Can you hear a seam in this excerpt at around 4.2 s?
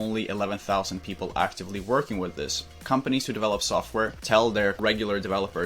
yes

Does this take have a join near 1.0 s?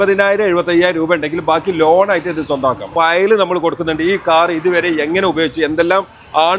no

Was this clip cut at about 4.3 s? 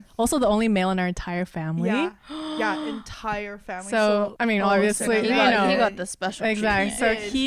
yes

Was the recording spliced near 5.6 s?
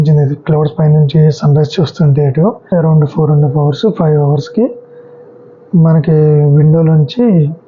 no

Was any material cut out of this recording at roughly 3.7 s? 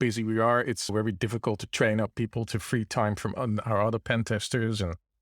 no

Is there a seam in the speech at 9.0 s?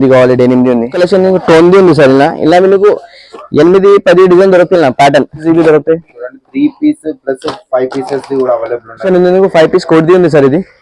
yes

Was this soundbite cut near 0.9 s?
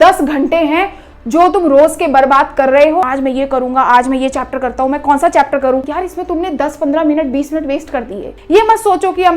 no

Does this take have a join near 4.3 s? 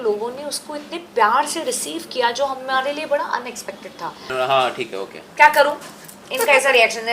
yes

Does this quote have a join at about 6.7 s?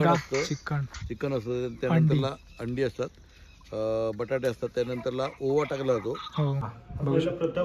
yes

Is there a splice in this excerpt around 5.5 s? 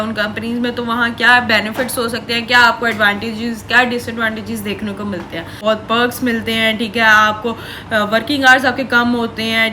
yes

